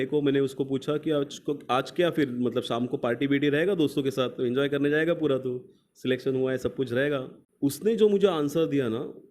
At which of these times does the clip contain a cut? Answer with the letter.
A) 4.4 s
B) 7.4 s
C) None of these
B